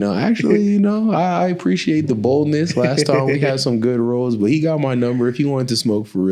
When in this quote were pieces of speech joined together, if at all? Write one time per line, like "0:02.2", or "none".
none